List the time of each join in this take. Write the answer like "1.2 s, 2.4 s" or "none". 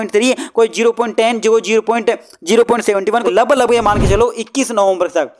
3.2 s